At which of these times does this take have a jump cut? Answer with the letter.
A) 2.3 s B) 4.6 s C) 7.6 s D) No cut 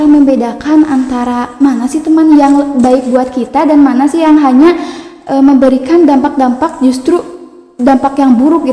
D